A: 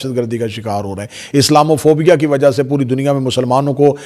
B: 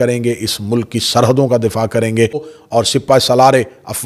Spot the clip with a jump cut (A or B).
B